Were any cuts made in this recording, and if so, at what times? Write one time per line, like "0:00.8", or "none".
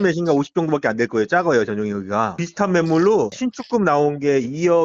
0:02.4